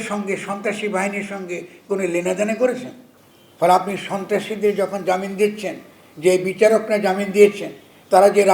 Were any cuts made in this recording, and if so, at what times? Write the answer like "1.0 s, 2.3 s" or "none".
none